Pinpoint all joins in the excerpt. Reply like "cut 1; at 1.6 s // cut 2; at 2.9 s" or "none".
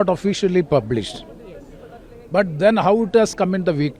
none